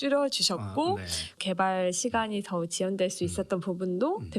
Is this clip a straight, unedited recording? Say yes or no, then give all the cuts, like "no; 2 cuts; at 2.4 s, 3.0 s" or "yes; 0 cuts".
no; 1 cut; at 1.4 s